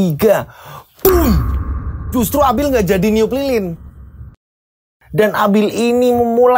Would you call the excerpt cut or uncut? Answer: cut